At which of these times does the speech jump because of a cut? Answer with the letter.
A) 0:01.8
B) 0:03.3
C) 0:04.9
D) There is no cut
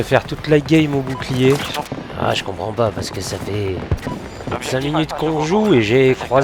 A